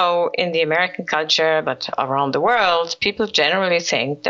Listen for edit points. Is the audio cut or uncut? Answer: uncut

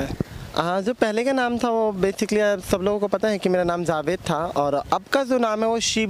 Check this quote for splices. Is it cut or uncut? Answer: uncut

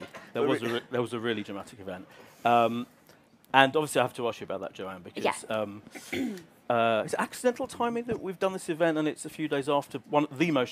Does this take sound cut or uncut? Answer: cut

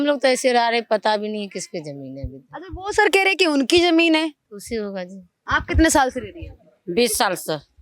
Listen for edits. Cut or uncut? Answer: cut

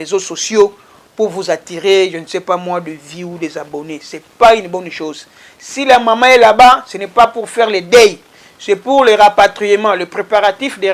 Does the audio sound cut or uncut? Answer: uncut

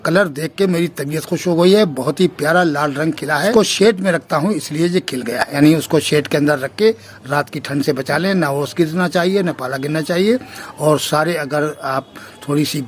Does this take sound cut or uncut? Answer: cut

